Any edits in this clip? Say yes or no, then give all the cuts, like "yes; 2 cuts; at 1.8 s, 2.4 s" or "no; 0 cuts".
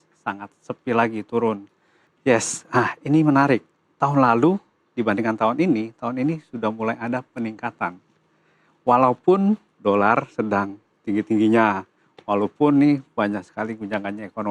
yes; 1 cut; at 2.0 s